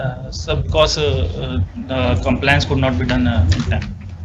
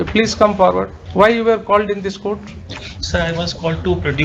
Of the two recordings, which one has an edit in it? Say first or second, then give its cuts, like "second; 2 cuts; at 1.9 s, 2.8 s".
second; 1 cut; at 1.0 s